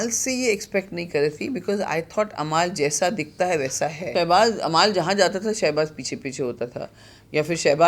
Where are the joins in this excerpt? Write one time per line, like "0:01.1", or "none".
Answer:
0:04.1